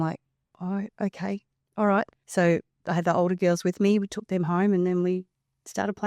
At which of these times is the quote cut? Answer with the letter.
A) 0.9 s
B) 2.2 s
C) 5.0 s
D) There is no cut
B